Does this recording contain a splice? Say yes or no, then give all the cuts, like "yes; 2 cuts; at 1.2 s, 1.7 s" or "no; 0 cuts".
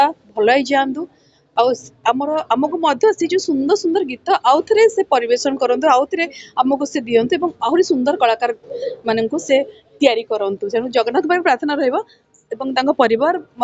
no; 0 cuts